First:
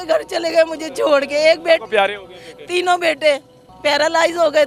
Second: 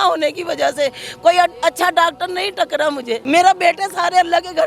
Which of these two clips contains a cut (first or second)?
second